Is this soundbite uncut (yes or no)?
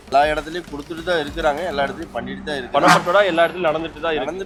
yes